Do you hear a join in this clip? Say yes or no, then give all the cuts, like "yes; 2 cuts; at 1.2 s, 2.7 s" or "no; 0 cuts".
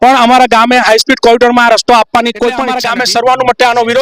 yes; 1 cut; at 2.8 s